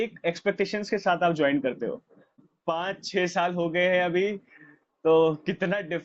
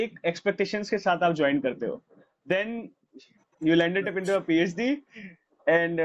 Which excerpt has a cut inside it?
first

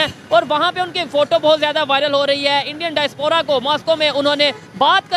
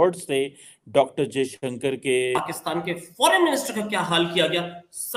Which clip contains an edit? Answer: second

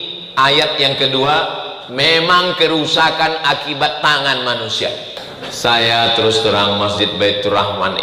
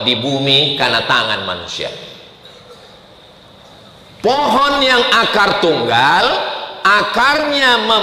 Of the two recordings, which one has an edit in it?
first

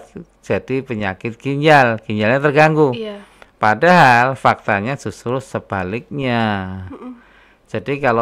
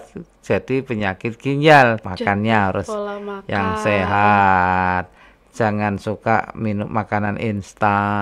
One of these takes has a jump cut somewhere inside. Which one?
second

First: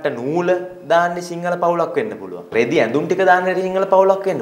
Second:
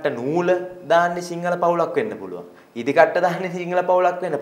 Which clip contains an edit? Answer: first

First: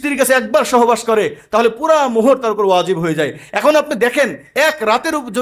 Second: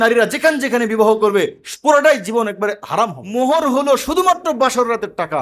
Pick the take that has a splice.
second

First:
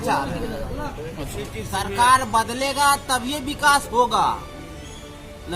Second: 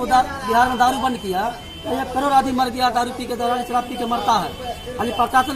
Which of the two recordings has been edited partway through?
first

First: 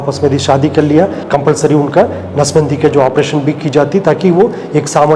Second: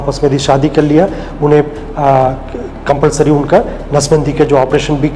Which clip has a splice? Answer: first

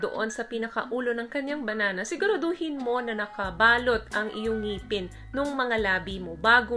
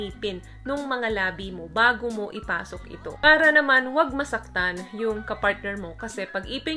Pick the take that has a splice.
second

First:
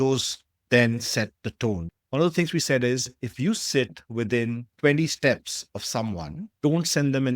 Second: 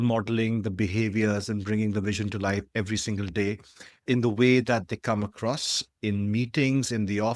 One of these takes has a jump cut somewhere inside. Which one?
first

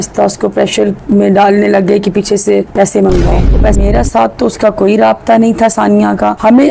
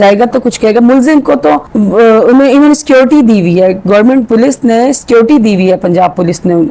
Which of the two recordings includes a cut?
first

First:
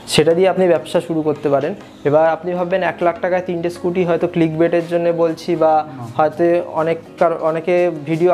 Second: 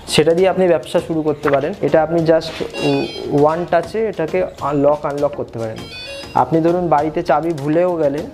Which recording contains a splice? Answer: second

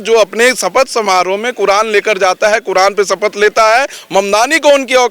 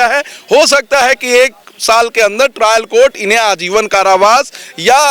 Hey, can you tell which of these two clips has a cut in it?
first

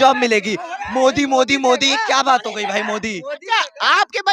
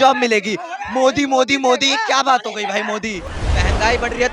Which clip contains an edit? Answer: second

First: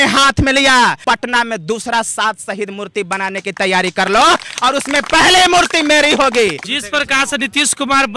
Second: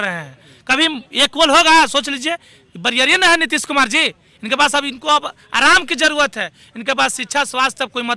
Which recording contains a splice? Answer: first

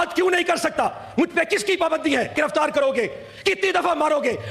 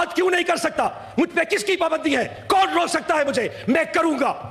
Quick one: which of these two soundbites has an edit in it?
first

